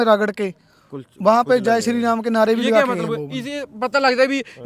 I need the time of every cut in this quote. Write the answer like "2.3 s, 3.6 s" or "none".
none